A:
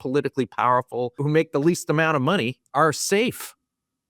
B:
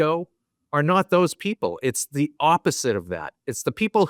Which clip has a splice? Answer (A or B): A